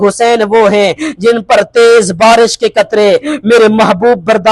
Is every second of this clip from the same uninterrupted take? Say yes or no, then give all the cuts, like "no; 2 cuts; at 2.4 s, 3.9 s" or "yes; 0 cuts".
yes; 0 cuts